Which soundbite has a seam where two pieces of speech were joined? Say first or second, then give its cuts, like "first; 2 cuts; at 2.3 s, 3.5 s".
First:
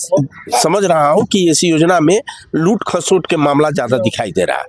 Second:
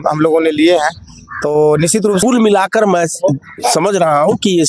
second; 1 cut; at 2.2 s